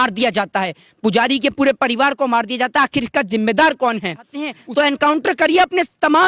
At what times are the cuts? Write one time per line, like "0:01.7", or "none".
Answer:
0:04.6